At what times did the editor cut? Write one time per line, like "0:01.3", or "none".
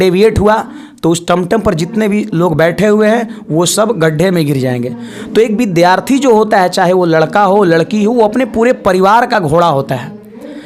none